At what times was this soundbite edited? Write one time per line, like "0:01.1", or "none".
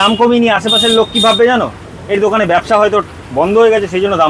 none